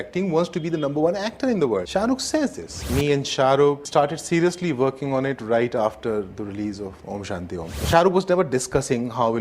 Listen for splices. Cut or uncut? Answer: cut